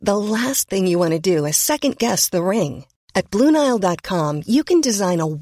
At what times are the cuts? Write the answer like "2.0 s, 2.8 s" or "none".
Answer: none